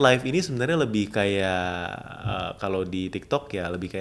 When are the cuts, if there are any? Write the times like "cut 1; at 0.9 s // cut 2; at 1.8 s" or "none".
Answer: none

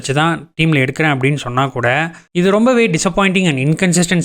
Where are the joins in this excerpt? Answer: cut 1; at 2.5 s

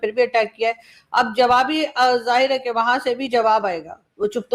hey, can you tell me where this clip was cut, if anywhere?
none

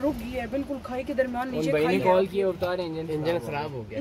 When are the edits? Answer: none

